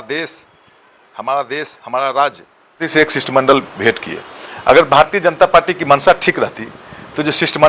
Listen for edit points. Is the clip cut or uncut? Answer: cut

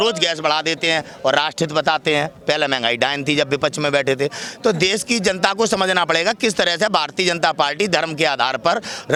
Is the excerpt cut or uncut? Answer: uncut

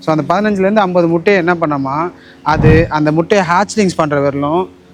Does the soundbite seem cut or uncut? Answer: uncut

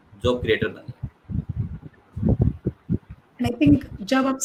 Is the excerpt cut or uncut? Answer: uncut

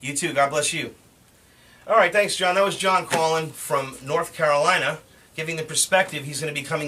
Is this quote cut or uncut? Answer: cut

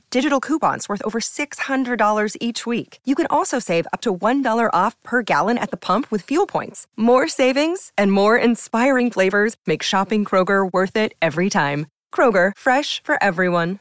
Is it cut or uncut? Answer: uncut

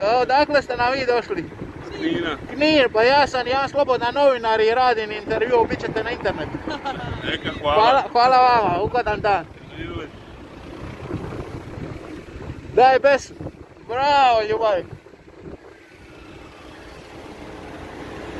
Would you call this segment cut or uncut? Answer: uncut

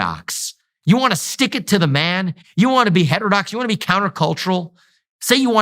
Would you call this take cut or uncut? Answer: cut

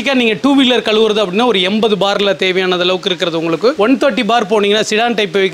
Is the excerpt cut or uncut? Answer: uncut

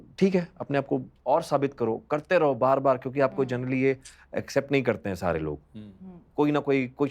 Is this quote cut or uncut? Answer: uncut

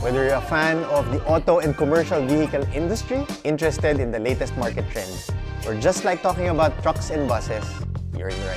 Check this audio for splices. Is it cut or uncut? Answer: uncut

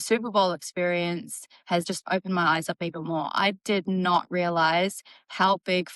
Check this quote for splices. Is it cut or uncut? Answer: cut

